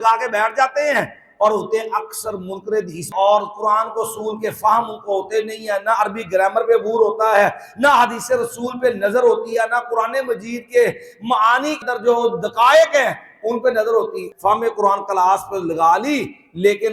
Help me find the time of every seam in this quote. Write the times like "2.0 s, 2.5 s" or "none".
3.1 s, 11.8 s, 14.2 s